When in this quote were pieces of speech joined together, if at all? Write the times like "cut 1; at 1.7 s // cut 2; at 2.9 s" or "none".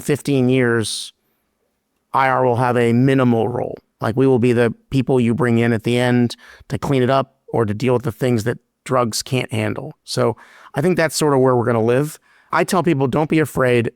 none